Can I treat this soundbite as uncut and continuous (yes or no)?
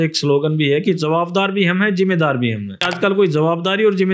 no